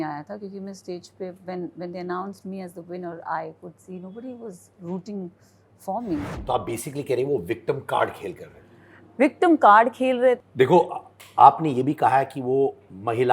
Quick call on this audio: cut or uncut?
cut